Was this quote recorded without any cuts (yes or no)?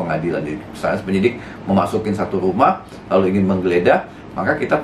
yes